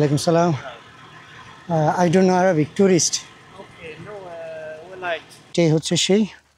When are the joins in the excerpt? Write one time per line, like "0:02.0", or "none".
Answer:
0:05.5